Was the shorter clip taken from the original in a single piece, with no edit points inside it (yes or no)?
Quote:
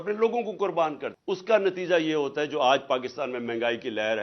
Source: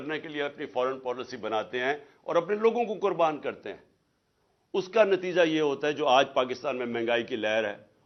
no